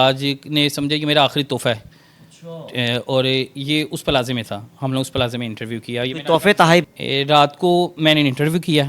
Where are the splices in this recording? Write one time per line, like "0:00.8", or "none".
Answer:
0:06.8